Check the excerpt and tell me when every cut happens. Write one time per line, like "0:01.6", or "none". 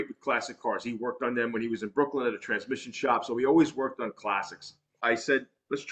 0:05.0